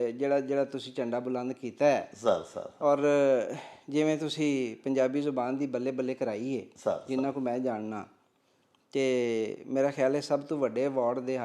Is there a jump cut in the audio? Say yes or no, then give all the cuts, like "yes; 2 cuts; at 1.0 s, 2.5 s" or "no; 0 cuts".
no; 0 cuts